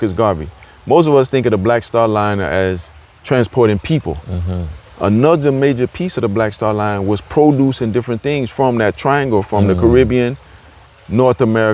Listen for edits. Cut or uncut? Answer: uncut